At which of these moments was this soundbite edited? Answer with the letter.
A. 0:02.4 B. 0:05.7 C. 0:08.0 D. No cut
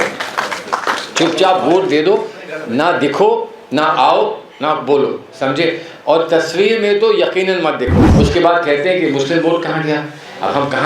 C